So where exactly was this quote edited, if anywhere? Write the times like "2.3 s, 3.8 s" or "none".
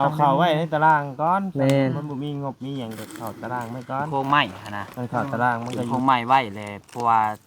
4.1 s, 4.9 s, 5.9 s